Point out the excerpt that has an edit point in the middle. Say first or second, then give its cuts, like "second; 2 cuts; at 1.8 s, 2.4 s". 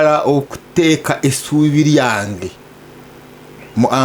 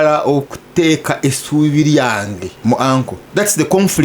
second; 2 cuts; at 2.5 s, 3.2 s